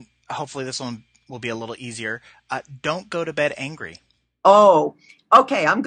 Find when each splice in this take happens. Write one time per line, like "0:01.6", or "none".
none